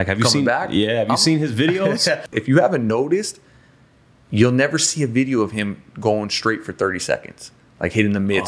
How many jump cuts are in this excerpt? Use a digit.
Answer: 1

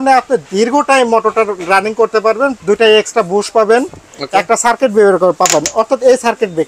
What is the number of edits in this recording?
1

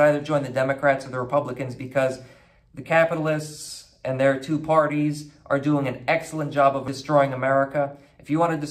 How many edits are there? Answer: 1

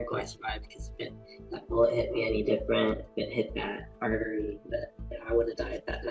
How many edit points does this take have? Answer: 0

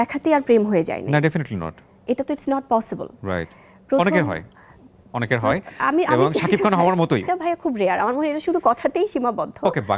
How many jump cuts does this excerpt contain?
1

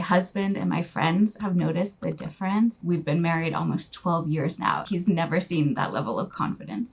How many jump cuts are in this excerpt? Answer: 2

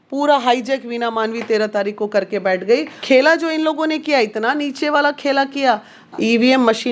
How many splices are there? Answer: 2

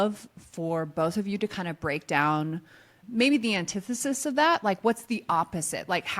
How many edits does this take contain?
1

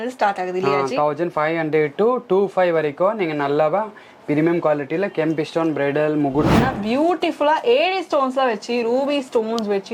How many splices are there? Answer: 1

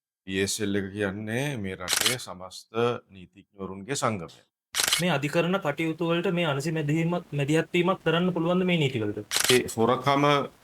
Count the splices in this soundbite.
2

